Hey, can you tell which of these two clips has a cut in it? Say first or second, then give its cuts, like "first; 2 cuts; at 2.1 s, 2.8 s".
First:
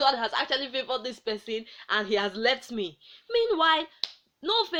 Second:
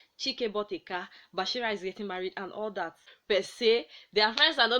second; 1 cut; at 3.1 s